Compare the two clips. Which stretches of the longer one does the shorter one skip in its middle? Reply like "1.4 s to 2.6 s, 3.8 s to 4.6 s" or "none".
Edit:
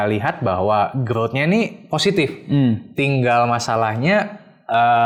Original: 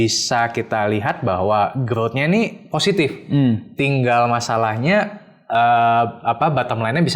none